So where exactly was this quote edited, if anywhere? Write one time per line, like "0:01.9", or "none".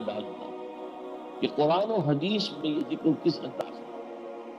0:03.6